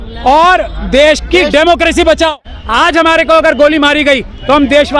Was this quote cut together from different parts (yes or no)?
yes